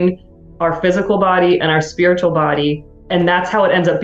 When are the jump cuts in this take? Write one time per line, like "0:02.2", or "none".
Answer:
0:02.9